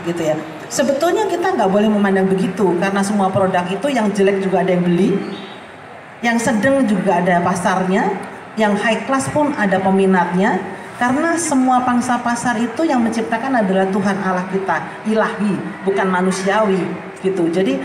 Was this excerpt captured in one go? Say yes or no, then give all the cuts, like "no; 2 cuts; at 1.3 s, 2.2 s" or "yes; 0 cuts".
yes; 0 cuts